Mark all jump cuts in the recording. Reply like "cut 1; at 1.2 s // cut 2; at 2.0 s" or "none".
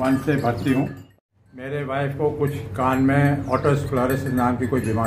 cut 1; at 1.0 s